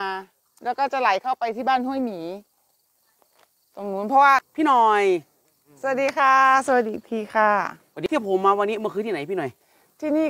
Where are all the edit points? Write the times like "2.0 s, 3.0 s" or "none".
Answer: 4.5 s, 8.2 s